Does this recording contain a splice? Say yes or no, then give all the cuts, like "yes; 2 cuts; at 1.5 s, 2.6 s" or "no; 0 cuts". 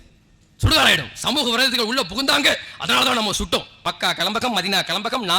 yes; 1 cut; at 3.7 s